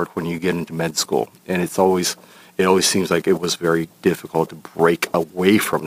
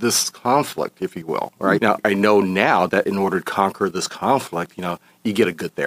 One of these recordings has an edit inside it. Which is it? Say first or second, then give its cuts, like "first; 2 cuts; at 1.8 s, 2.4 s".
second; 1 cut; at 1.8 s